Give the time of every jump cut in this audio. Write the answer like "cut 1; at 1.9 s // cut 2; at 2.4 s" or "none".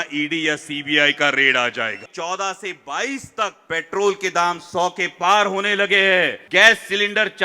cut 1; at 2.1 s // cut 2; at 3.6 s // cut 3; at 6.4 s